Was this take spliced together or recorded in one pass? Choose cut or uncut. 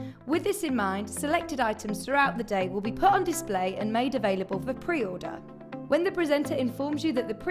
uncut